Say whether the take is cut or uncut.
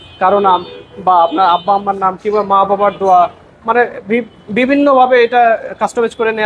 uncut